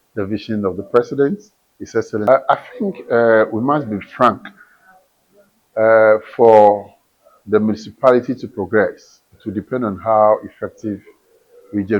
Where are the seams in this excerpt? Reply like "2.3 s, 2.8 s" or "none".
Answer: 2.2 s